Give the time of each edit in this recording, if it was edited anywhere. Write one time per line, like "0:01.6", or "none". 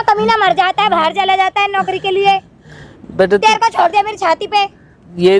none